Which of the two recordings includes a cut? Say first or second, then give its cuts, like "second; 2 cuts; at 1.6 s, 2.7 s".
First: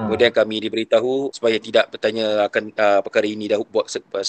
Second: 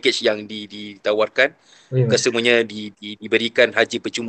first; 1 cut; at 1.3 s